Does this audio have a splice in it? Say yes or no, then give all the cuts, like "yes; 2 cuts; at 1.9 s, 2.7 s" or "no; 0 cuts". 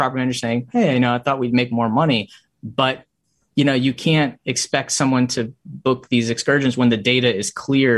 no; 0 cuts